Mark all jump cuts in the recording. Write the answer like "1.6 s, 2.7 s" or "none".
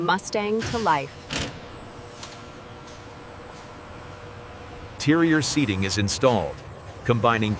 4.9 s